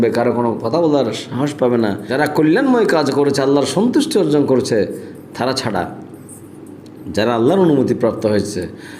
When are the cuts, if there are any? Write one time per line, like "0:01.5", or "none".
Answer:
0:02.1